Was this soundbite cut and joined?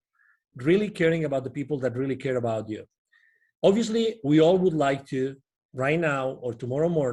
no; 0 cuts

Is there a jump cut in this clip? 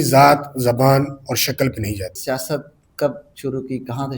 yes; 1 cut; at 2.2 s

